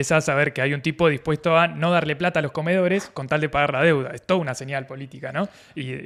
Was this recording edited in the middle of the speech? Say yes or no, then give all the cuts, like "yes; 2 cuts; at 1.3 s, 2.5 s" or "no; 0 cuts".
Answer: no; 0 cuts